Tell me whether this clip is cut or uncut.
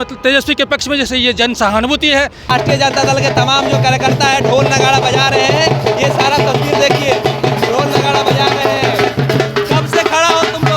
cut